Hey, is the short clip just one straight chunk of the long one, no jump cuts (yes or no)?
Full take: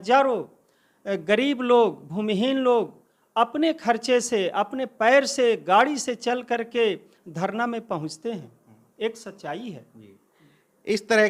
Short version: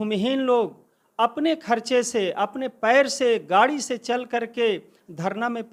yes